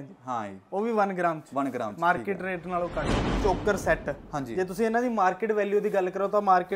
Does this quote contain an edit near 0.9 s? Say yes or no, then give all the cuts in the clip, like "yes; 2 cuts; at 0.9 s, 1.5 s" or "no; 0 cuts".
no; 1 cut; at 3.2 s